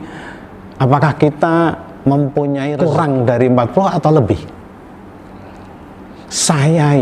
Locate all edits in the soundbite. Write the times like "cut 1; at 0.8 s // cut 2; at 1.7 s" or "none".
cut 1; at 2.7 s